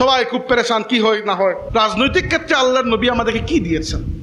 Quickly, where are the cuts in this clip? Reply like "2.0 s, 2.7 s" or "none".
1.6 s